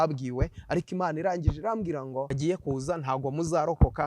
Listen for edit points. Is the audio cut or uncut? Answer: cut